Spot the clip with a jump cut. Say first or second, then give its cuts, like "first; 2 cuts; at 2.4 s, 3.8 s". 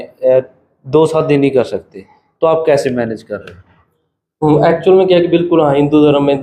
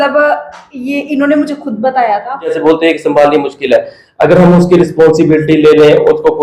second; 1 cut; at 2.6 s